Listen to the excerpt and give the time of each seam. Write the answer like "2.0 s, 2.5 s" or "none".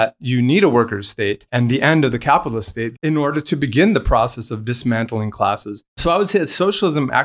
1.4 s, 3.0 s, 6.0 s